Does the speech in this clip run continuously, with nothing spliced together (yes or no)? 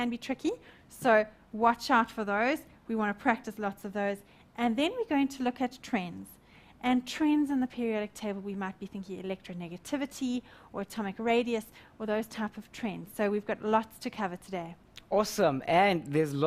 no